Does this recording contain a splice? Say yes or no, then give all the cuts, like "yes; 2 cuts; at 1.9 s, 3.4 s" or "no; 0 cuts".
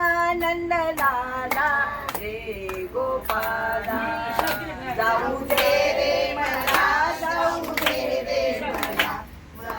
no; 0 cuts